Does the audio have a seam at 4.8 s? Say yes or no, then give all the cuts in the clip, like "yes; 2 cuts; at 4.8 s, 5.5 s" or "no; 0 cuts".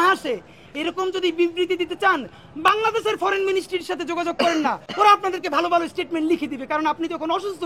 no; 0 cuts